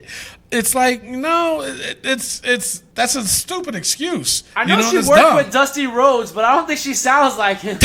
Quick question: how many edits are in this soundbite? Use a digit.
2